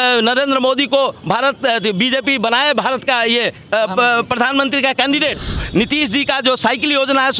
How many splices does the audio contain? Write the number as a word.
one